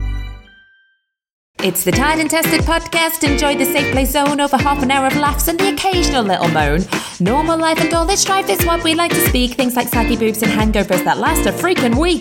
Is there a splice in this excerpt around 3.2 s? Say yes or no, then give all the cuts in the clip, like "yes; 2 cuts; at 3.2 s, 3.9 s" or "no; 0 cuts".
no; 1 cut; at 1.6 s